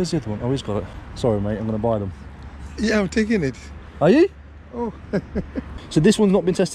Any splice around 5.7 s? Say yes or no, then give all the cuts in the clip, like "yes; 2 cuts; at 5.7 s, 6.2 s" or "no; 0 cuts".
yes; 2 cuts; at 1.0 s, 5.7 s